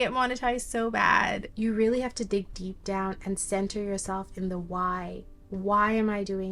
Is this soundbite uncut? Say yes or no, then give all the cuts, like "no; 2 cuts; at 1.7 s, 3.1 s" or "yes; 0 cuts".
no; 1 cut; at 1.4 s